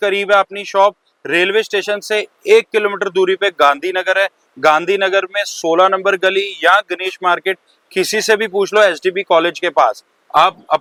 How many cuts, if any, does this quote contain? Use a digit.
0